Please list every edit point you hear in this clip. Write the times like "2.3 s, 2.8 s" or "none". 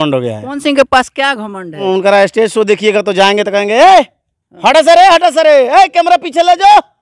1.8 s